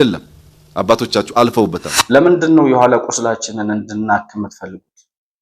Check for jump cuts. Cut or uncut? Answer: cut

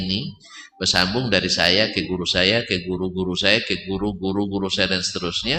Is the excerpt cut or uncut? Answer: uncut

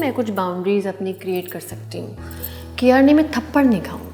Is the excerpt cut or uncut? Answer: uncut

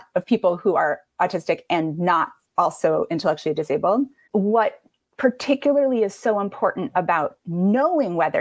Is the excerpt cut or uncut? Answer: cut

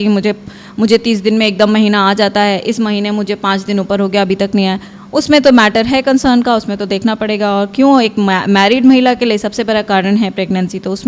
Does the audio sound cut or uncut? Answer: uncut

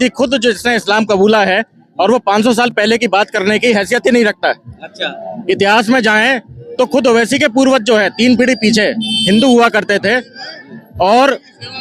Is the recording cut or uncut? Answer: uncut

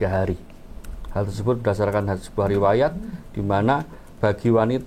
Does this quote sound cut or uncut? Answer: uncut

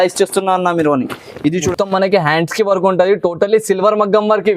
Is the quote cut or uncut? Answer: cut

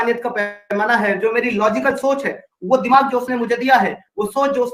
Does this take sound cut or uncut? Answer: uncut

